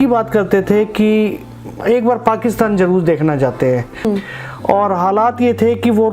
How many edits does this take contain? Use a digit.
1